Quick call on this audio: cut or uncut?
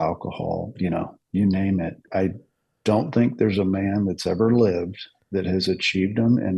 cut